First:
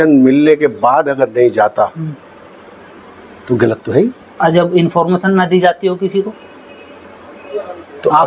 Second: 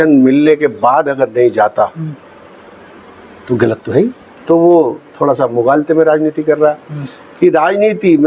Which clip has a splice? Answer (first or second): second